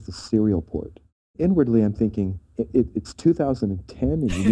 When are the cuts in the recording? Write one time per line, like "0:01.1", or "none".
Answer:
0:01.3
0:02.4